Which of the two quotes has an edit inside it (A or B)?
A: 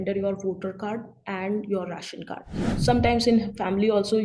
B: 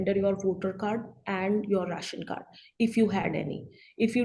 A